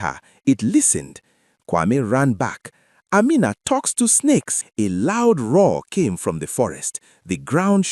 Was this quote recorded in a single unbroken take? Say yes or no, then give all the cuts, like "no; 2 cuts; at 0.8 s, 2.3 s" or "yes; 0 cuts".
no; 1 cut; at 4.6 s